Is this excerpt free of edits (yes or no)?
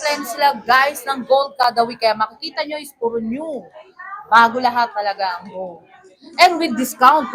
yes